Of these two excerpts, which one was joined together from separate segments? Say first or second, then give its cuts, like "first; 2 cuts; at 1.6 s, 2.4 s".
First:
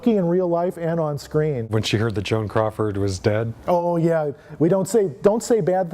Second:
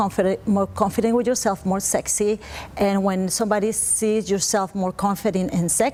first; 1 cut; at 1.7 s